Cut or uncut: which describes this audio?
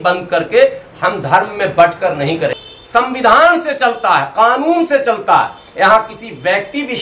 cut